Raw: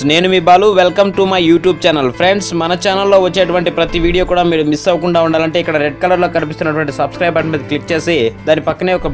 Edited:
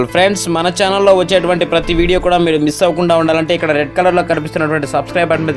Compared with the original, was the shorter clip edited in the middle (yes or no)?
no